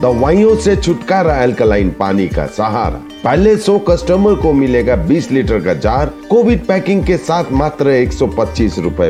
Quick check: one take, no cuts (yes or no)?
yes